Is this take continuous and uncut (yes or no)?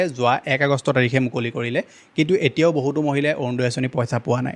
yes